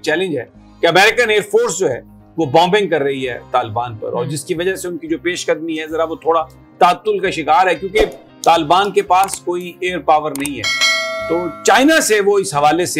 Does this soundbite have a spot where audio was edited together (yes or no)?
no